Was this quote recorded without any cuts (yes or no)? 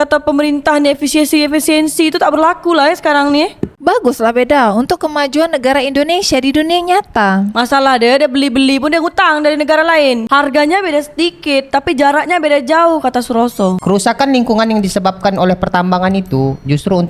no